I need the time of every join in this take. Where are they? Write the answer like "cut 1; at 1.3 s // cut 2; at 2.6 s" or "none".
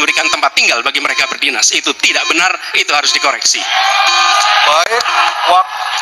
none